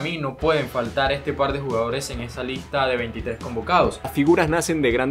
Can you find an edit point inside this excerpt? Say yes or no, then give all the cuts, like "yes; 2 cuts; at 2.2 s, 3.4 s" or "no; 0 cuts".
yes; 1 cut; at 4.1 s